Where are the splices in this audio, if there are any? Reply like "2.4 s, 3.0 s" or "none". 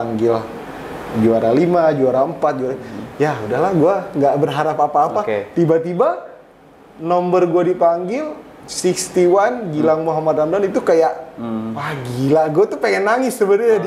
none